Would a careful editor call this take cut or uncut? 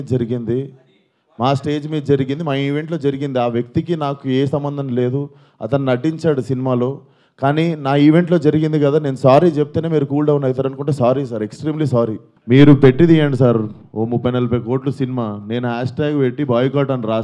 cut